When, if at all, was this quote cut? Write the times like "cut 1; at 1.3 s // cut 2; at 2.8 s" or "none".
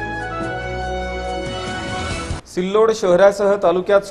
none